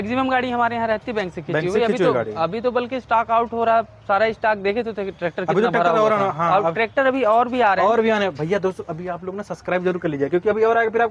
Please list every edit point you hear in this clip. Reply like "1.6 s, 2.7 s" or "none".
none